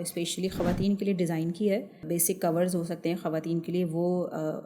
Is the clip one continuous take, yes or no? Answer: no